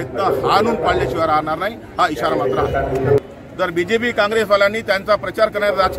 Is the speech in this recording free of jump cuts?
no; 1 cut; at 3.2 s

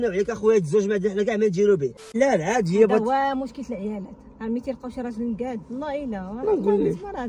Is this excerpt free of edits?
no; 1 cut; at 2.0 s

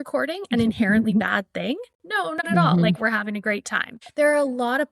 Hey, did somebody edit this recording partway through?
yes; 1 cut; at 4.0 s

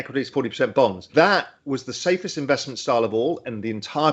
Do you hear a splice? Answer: no; 0 cuts

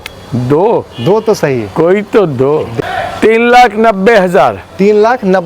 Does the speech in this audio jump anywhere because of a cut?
yes; 1 cut; at 2.7 s

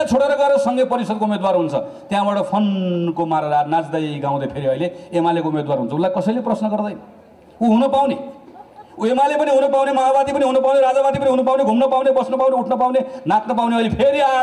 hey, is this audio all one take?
yes; 0 cuts

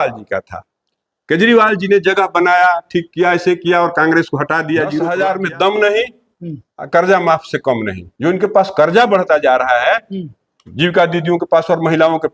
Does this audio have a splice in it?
yes; 1 cut; at 5.0 s

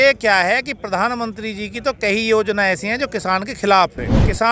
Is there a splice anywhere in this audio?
no; 0 cuts

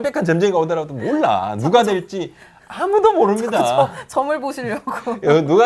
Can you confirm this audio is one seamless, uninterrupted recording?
yes; 0 cuts

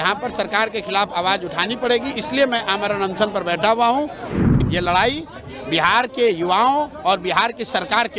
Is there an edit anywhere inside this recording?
yes; 1 cut; at 4.2 s

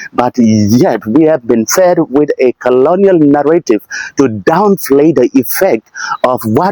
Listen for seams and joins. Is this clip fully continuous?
yes; 0 cuts

